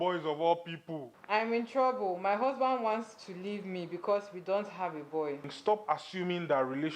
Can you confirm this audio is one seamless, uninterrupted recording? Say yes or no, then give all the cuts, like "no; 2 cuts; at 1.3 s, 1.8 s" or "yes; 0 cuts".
no; 2 cuts; at 1.2 s, 5.5 s